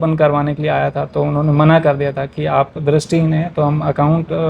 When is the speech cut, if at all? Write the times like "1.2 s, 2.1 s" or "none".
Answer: none